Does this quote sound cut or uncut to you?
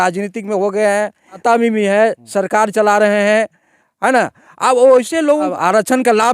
cut